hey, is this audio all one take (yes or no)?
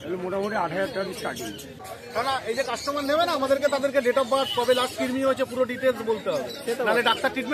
no